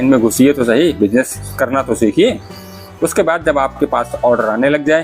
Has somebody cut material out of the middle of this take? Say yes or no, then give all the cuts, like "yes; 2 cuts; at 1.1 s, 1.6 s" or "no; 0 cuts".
yes; 1 cut; at 1.4 s